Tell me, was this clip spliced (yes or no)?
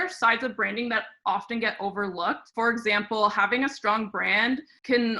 no